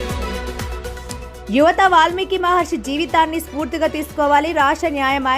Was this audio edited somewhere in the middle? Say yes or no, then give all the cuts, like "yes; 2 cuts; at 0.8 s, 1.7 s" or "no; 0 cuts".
yes; 1 cut; at 1.3 s